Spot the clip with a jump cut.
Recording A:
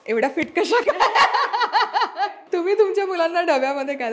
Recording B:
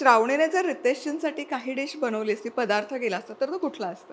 A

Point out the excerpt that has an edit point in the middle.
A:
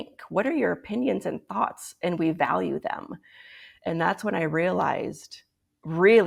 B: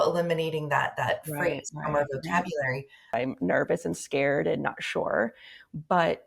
B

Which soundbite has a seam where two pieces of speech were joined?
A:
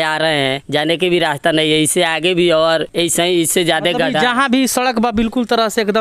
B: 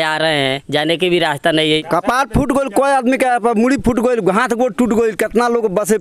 B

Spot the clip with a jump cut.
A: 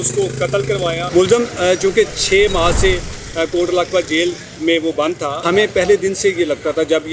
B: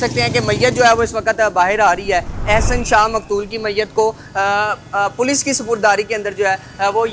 A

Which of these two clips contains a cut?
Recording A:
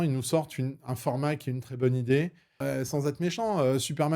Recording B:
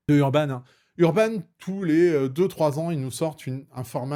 A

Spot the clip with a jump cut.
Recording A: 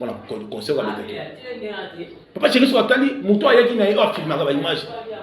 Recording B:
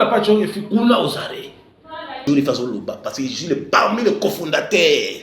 B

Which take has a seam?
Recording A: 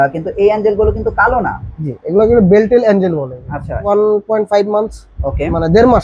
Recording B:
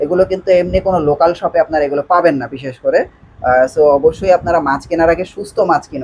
A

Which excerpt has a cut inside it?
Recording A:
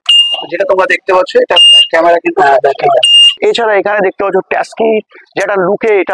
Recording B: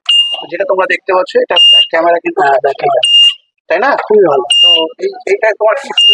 A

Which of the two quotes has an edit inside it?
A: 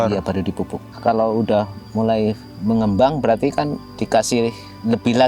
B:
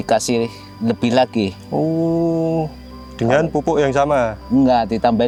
A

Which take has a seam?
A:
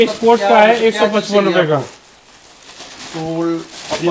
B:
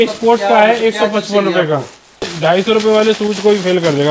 B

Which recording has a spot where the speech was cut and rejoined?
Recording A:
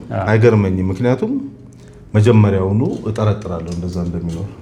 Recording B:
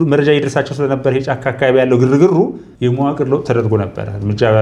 B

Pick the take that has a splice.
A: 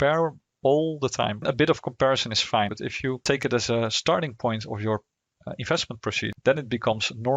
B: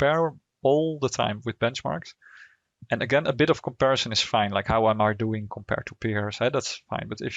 A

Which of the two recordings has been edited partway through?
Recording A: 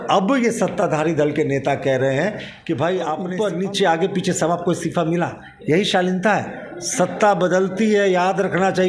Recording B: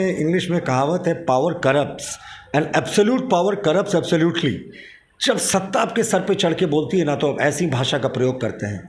A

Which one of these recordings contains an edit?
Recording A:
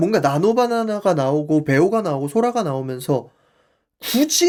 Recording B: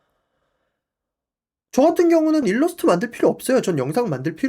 B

